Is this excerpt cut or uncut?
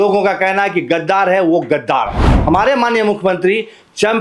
cut